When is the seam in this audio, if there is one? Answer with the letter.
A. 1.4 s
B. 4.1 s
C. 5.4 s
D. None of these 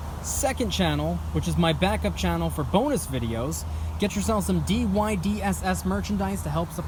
D